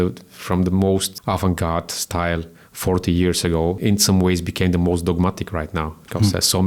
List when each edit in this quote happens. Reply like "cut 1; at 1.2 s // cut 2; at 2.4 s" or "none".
cut 1; at 1.1 s // cut 2; at 3.8 s